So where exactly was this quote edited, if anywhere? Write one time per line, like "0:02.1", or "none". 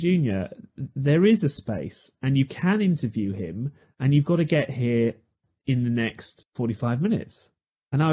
none